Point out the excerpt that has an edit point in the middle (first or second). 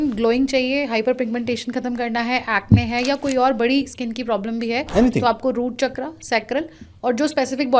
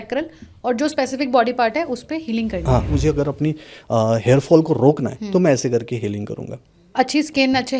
second